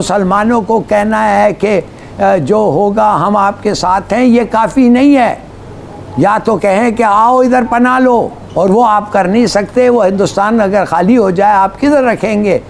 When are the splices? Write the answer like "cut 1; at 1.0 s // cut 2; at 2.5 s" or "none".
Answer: none